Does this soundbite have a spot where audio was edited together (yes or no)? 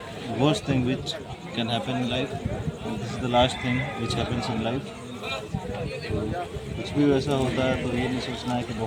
no